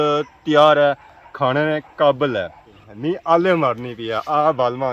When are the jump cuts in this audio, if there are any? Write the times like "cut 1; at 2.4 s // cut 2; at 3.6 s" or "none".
cut 1; at 2.8 s